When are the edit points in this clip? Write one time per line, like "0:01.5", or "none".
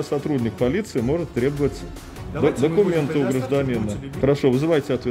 0:04.0